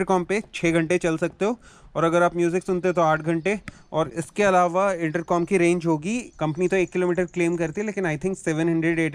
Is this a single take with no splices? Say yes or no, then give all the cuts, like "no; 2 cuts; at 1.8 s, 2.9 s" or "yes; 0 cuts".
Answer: yes; 0 cuts